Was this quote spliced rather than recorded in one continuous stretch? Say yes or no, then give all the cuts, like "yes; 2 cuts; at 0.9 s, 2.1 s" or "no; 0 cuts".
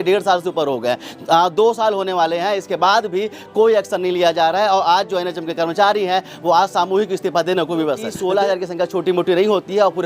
yes; 1 cut; at 8.1 s